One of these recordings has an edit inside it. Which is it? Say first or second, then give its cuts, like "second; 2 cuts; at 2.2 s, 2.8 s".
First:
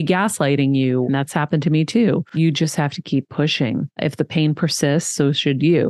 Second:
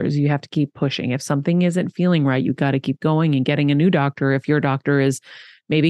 first; 3 cuts; at 1.1 s, 2.3 s, 3.9 s